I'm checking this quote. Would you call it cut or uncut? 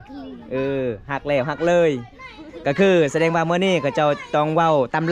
uncut